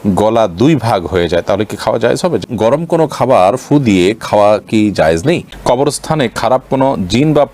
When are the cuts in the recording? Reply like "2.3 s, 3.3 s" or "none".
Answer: 2.4 s, 5.6 s